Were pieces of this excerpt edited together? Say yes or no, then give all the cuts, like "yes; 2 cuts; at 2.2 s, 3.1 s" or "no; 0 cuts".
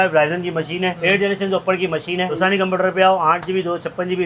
yes; 2 cuts; at 1.0 s, 2.3 s